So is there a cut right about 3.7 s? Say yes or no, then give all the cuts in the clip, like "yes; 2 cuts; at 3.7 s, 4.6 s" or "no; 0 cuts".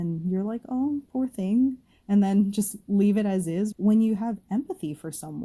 yes; 1 cut; at 3.7 s